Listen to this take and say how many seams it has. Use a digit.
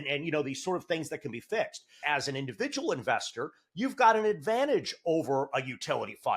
1